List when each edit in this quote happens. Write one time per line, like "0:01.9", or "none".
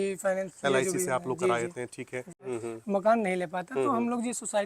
0:02.5